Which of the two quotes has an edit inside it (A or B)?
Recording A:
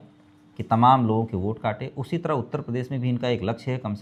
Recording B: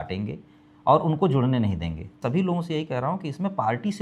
B